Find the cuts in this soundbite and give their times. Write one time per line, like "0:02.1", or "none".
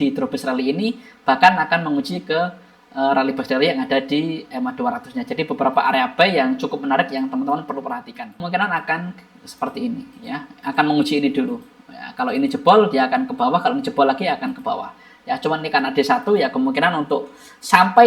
0:08.4